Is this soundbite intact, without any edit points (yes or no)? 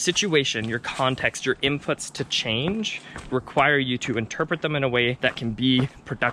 no